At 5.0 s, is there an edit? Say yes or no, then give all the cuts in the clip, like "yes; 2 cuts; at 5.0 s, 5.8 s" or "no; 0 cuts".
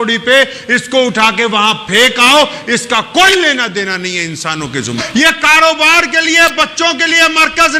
yes; 1 cut; at 5.0 s